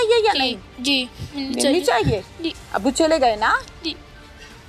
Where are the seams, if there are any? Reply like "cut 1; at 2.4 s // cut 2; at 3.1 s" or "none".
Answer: none